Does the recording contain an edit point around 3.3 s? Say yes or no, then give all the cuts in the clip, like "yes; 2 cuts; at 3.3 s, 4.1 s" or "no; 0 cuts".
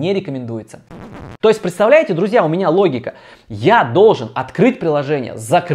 no; 1 cut; at 1.2 s